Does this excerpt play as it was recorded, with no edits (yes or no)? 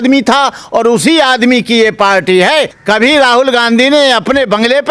no